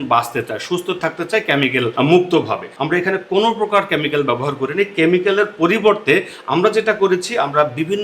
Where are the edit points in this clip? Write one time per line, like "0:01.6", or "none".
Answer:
0:01.9
0:02.7